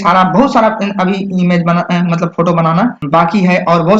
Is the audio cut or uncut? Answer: cut